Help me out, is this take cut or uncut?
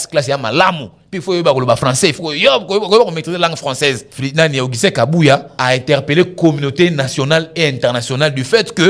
cut